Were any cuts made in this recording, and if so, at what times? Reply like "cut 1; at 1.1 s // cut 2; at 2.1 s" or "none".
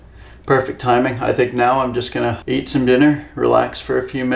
cut 1; at 2.4 s